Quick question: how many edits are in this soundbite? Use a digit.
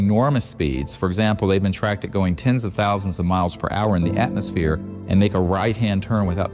0